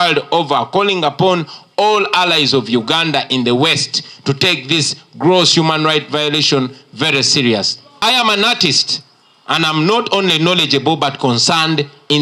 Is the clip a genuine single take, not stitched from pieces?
no; 1 cut; at 8.0 s

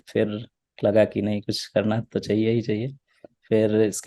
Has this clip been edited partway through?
no; 0 cuts

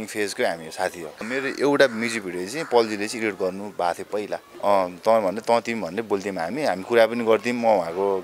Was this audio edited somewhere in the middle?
yes; 2 cuts; at 1.2 s, 4.4 s

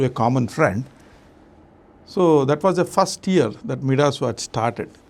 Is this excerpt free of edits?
yes; 0 cuts

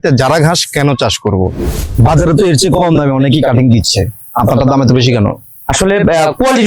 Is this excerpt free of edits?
no; 1 cut; at 1.9 s

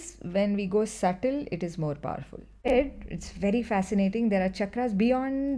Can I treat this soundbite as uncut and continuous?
no; 1 cut; at 2.7 s

